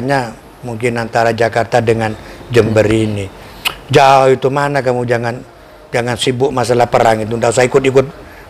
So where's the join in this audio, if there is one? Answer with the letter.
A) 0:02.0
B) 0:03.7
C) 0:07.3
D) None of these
D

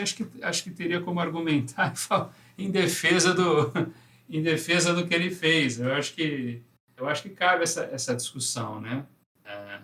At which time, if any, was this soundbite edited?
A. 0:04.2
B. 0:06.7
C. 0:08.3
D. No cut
D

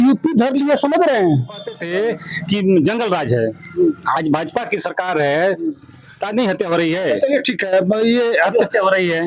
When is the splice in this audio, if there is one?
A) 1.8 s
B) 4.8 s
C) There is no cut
A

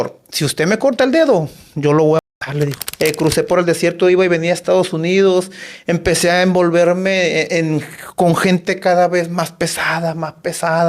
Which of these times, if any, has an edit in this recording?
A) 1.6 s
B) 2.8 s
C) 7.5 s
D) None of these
B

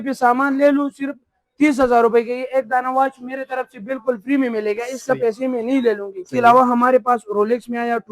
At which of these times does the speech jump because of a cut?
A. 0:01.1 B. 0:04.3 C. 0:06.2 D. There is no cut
C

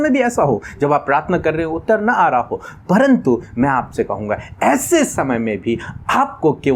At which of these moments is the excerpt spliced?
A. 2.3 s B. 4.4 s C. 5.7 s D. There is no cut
D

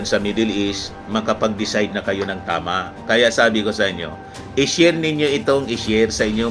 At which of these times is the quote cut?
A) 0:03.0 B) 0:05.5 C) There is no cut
C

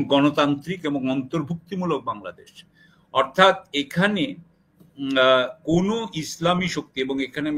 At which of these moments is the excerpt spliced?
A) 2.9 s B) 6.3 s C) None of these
C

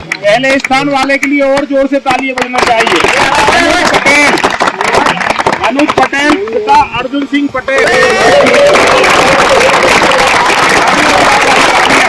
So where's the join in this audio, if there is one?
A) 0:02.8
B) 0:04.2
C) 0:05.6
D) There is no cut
D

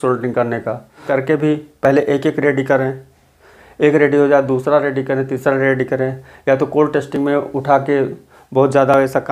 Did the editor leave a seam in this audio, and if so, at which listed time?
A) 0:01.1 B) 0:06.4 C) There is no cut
A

